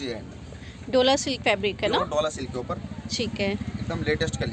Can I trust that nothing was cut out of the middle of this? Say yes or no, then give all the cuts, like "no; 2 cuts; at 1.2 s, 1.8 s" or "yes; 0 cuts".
yes; 0 cuts